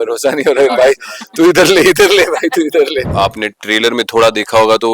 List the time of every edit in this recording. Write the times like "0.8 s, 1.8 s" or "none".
3.1 s